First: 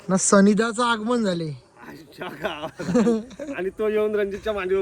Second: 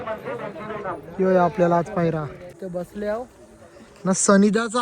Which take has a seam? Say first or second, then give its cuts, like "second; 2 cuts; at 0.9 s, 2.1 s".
second; 1 cut; at 2.6 s